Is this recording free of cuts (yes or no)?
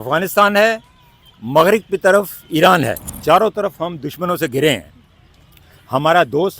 no